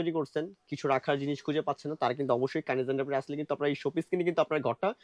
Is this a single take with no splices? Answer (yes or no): yes